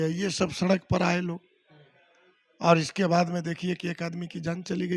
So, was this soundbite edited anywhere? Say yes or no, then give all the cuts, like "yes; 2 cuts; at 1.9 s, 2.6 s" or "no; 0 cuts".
no; 0 cuts